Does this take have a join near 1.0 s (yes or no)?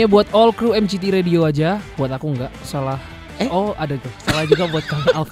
no